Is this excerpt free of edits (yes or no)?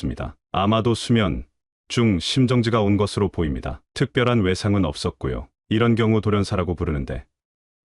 yes